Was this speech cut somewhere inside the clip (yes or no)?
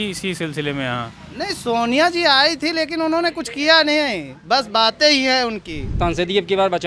yes